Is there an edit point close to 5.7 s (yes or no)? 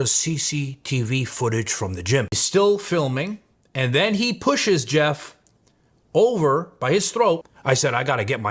no